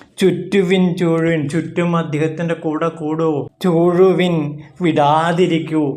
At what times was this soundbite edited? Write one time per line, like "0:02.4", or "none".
0:03.5